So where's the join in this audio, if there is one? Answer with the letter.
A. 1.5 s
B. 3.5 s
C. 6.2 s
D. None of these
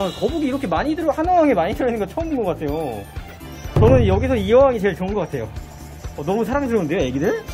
B